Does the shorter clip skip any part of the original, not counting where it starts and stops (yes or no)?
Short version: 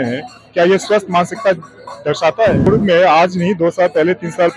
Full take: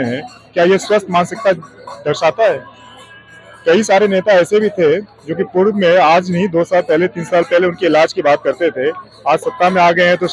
yes